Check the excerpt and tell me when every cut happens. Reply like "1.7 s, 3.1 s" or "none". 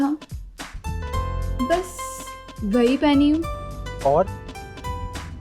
3.6 s